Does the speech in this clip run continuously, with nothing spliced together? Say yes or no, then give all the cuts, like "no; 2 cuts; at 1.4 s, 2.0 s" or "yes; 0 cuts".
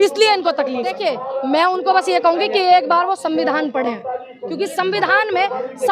no; 1 cut; at 1.0 s